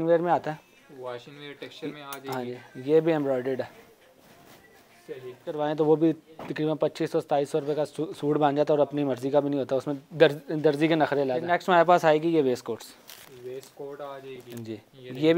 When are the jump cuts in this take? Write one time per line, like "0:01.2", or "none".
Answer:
0:05.6
0:11.4